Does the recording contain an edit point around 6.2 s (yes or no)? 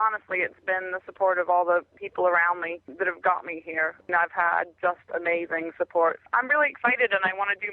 yes